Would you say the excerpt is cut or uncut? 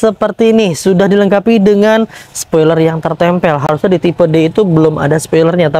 uncut